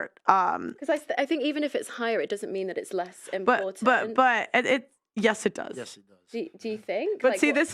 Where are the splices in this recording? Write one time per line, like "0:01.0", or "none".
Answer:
0:05.0